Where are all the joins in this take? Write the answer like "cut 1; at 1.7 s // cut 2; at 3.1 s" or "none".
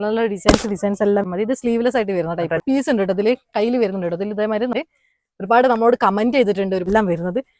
cut 1; at 1.3 s // cut 2; at 2.6 s // cut 3; at 4.7 s // cut 4; at 6.9 s

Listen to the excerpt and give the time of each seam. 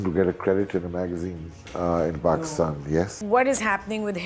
cut 1; at 3.2 s

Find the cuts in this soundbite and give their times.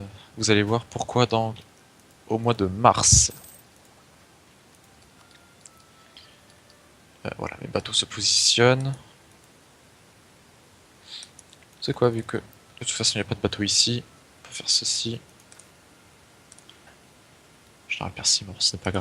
cut 1; at 18.0 s

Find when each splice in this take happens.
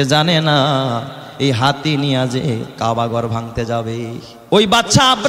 cut 1; at 4.3 s

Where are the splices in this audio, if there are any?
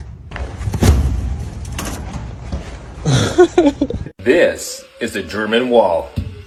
none

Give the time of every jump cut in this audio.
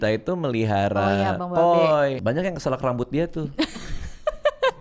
cut 1; at 2.2 s

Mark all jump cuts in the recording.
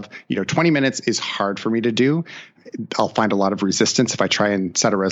cut 1; at 2.5 s

